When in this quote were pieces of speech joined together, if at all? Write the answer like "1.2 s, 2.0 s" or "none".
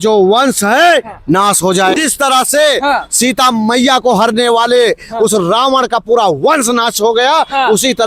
1.9 s